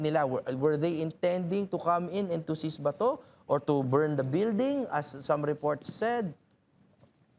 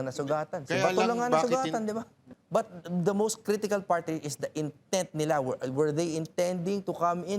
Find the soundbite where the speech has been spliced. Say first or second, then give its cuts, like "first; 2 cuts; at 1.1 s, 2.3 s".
second; 1 cut; at 2.3 s